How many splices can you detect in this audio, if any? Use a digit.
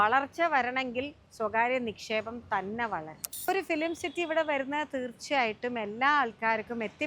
1